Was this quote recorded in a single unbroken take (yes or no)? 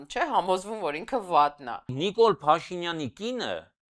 no